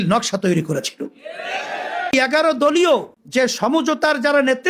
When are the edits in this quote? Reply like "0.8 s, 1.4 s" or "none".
2.1 s, 3.2 s